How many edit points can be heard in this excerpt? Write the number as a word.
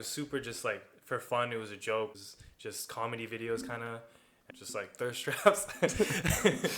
two